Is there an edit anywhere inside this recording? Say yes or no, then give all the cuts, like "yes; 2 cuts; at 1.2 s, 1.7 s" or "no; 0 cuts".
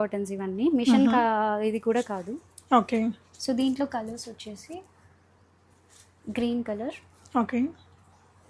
no; 0 cuts